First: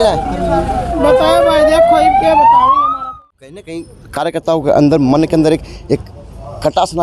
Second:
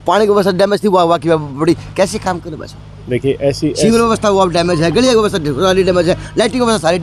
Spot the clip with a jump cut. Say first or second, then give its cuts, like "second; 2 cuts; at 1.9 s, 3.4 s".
first; 1 cut; at 3.0 s